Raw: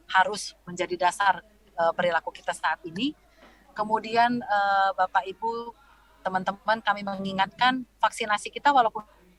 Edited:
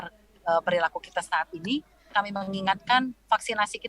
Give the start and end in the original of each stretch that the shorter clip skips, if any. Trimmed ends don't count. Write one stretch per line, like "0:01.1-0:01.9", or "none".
0:03.4-0:06.8